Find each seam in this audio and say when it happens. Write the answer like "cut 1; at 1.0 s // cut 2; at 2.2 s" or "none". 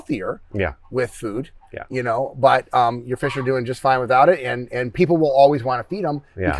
none